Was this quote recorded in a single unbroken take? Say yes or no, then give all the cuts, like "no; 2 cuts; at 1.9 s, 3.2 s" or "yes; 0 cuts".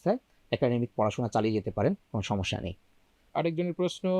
yes; 0 cuts